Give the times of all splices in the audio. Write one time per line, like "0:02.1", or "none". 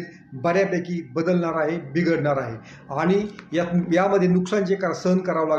none

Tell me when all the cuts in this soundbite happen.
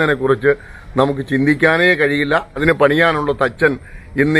0:02.6

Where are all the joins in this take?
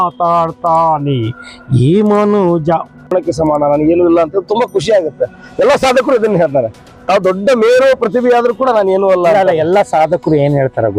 0:03.1

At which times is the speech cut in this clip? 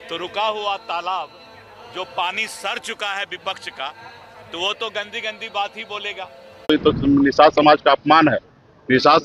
0:06.7

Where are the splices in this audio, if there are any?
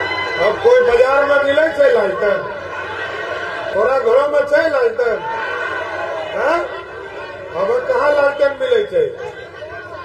0:03.7

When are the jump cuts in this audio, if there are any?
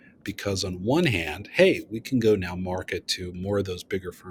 none

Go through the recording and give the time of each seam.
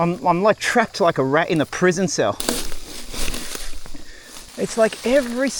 none

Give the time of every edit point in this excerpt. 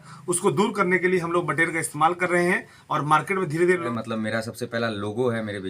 0:03.9

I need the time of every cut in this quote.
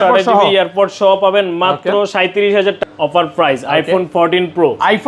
0:02.8

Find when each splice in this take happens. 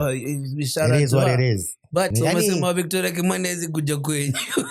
0:02.1

